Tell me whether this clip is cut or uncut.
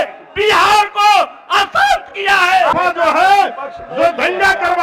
cut